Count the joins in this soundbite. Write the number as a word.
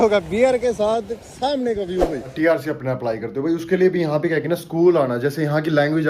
one